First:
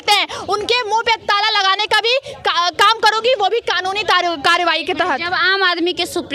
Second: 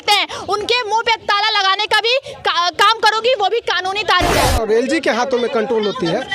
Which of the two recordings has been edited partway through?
second; 1 cut; at 4.4 s

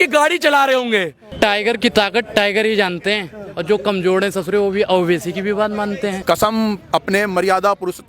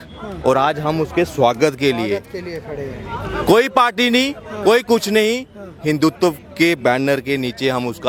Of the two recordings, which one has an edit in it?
first; 2 cuts; at 1.2 s, 6.2 s

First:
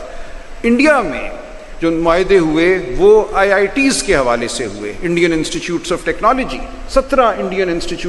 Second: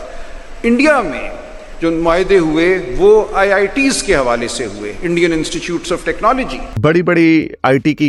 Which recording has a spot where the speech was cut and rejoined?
second; 1 cut; at 6.6 s

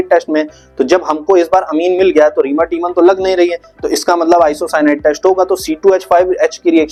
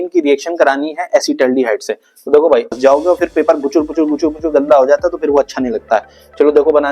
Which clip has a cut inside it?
second; 1 cut; at 2.7 s

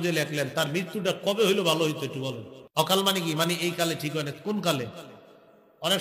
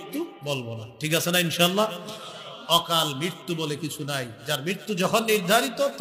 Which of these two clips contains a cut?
first; 1 cut; at 2.9 s

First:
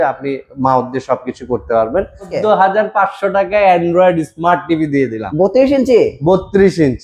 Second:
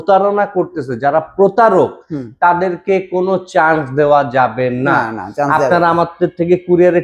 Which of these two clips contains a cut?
first; 1 cut; at 2.3 s

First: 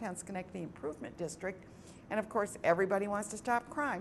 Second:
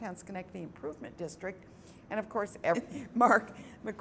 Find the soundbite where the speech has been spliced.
first; 1 cut; at 2.8 s

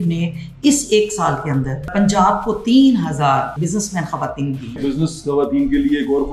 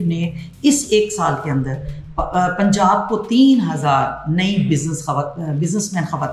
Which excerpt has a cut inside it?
first; 3 cuts; at 1.9 s, 3.5 s, 4.8 s

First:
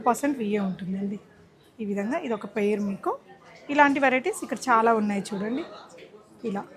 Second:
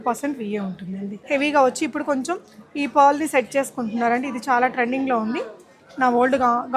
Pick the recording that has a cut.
second; 1 cut; at 1.1 s

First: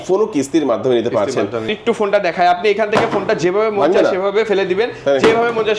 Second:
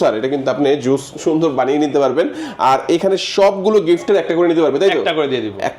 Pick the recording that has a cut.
first; 1 cut; at 1.7 s

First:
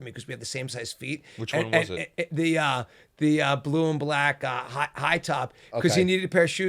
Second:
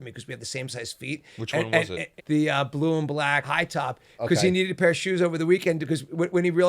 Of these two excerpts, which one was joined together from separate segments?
second; 2 cuts; at 2.1 s, 3.4 s

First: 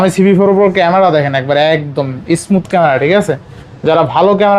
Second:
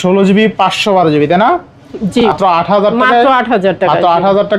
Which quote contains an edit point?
second; 1 cut; at 2.3 s

